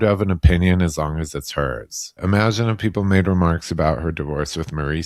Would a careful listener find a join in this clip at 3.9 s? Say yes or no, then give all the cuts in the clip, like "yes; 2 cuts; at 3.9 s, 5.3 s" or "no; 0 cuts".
no; 1 cut; at 2.1 s